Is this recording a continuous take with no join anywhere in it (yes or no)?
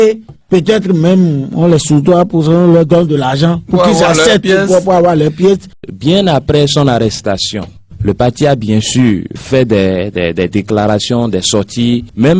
no